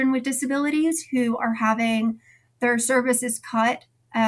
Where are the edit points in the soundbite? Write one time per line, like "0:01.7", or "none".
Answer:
none

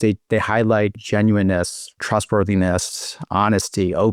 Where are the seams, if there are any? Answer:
0:01.0

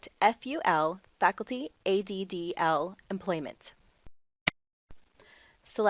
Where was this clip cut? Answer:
none

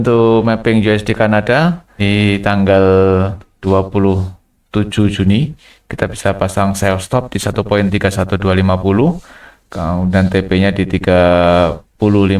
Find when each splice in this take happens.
0:01.9
0:03.5

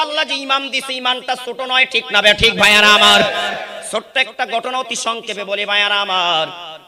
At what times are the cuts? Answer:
none

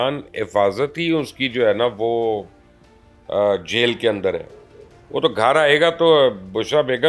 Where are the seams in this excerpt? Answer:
none

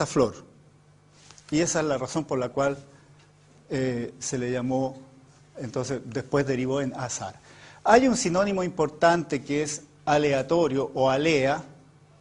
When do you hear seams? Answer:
0:07.6

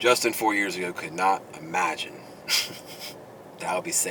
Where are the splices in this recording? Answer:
none

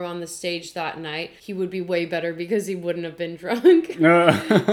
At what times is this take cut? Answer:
none

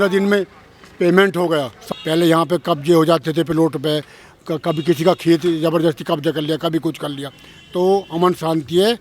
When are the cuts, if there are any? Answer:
0:01.8

